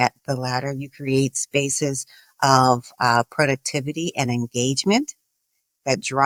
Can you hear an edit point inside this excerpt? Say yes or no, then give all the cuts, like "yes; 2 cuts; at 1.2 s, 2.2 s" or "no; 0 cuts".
no; 0 cuts